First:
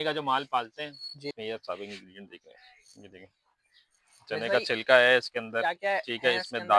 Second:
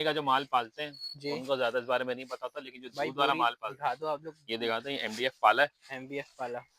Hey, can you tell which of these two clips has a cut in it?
first; 1 cut; at 1.3 s

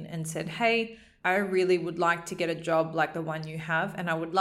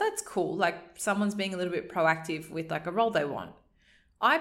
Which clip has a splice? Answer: first; 1 cut; at 1.0 s

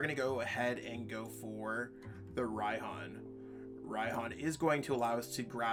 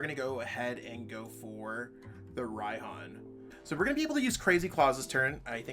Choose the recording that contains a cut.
second; 1 cut; at 3.5 s

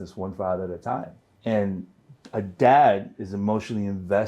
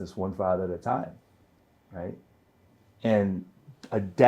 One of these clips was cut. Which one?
first; 1 cut; at 1.2 s

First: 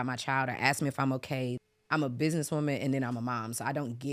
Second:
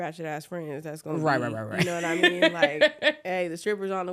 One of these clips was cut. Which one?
first; 1 cut; at 1.6 s

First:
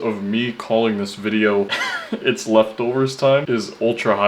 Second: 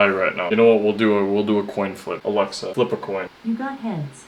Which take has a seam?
second; 2 cuts; at 2.1 s, 3.3 s

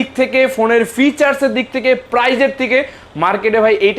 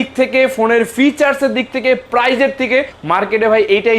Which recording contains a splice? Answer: second; 1 cut; at 3.0 s

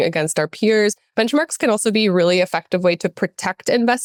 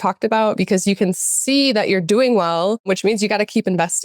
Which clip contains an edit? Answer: second; 1 cut; at 2.9 s

